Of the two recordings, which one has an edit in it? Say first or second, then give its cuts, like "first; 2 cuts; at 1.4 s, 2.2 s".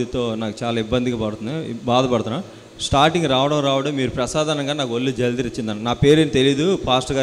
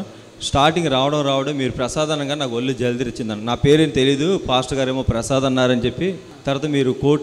second; 1 cut; at 6.3 s